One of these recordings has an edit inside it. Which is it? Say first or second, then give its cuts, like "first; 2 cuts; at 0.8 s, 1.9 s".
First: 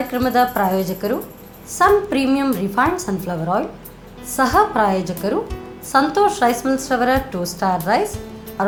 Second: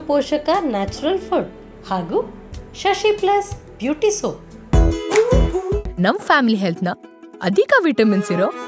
second; 1 cut; at 4.5 s